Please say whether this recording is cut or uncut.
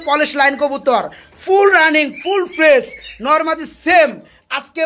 uncut